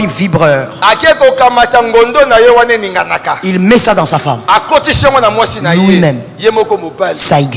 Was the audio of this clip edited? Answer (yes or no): no